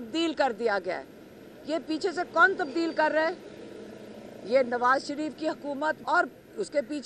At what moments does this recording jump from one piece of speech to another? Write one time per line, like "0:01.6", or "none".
0:06.0